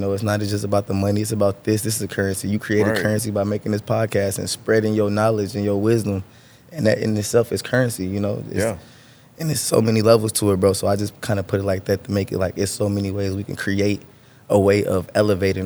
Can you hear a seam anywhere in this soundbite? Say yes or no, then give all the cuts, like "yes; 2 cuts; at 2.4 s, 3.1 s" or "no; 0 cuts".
no; 0 cuts